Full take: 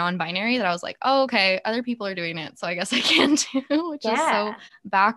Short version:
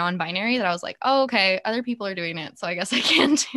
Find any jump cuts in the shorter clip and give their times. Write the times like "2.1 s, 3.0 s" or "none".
none